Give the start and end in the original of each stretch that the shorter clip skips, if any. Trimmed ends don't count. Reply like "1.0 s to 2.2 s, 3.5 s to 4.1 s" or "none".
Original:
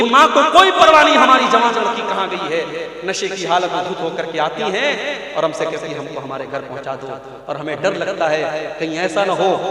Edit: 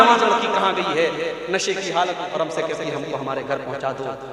3.8 s to 5.3 s